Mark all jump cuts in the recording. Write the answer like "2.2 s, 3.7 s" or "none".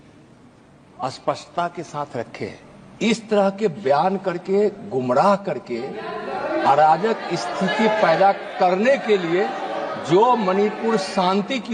none